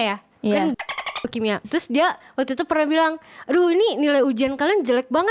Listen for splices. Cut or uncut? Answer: cut